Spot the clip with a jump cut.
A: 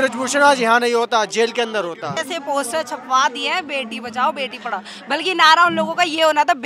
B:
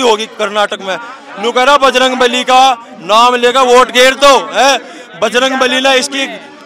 A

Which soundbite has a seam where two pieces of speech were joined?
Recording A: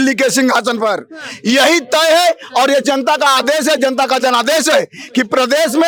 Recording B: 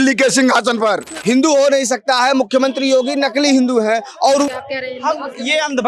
B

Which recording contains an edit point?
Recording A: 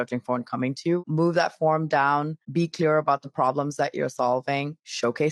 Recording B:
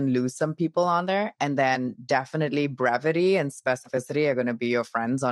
A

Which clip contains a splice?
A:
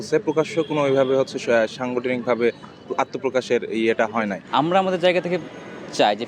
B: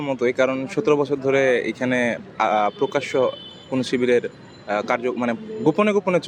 A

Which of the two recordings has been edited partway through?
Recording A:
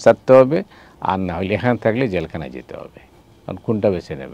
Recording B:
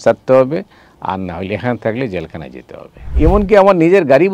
B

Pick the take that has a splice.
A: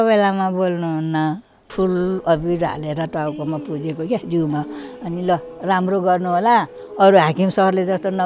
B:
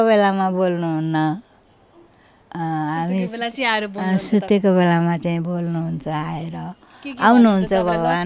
A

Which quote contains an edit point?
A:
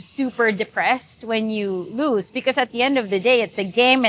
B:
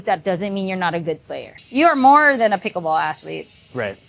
B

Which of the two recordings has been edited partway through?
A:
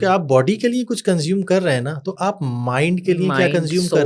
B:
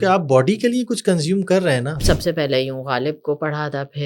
B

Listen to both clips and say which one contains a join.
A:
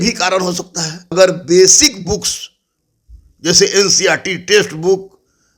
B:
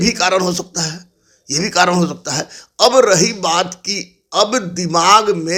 A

